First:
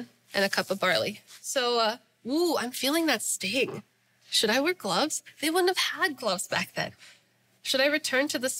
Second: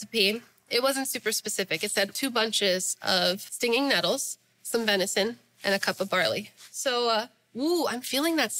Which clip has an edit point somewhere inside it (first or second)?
second